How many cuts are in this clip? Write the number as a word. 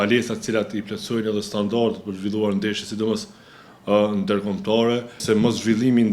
one